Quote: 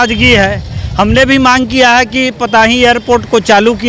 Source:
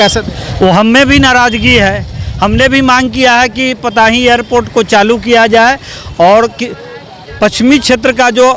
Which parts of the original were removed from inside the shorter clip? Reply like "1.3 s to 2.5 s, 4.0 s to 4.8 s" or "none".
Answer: none

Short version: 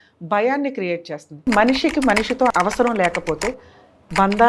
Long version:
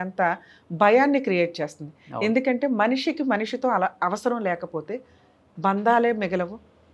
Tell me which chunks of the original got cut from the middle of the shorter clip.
2.0 s to 2.7 s, 3.7 s to 4.0 s

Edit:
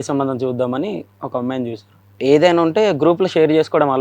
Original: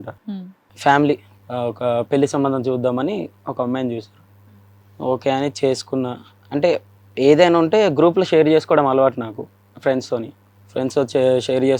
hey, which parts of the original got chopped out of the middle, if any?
4.3 s to 7.0 s

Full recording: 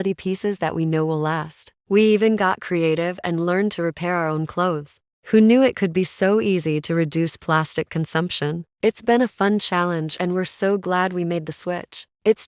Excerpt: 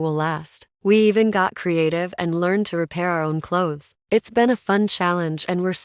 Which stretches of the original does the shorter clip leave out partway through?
5.0 s to 8.7 s

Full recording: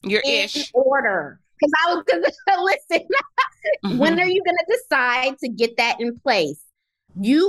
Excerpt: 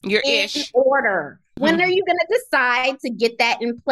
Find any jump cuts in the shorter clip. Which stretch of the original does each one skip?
1.6 s to 3.9 s

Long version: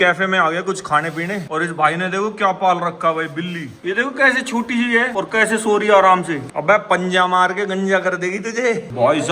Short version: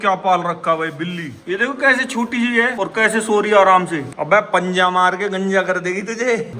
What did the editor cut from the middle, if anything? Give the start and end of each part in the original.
none

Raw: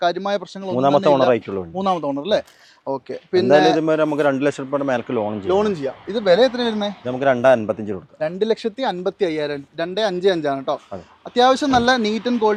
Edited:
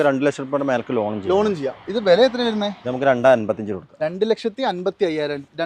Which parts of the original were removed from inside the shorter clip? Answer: none

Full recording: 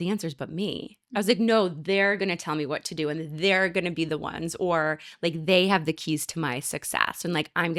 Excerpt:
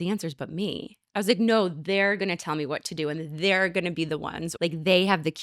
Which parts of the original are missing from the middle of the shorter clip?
4.5 s to 5.1 s

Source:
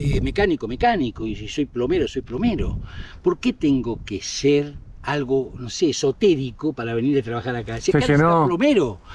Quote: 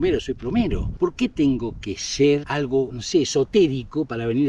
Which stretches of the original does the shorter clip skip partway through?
2.7 s to 3.1 s, 5.1 s to 5.5 s

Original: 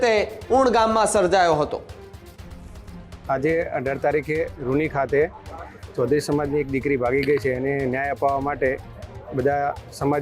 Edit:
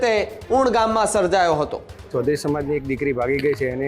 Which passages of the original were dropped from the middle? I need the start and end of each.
1.9 s to 5.8 s

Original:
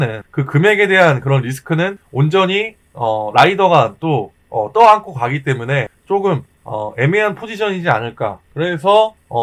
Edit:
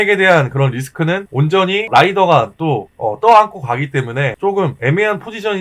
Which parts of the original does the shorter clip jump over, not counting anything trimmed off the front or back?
2.0 s to 2.8 s, 4.3 s to 4.4 s, 6.1 s to 6.8 s

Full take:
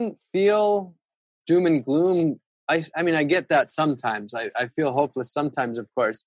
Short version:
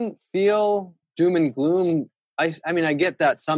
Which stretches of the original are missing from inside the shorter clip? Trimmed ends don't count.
1.0 s to 1.3 s

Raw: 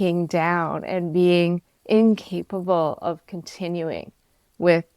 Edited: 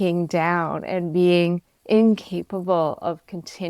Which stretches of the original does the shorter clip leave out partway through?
none

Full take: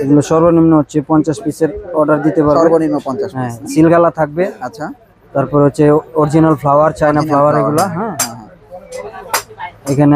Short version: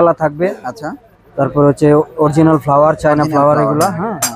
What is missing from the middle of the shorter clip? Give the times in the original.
none

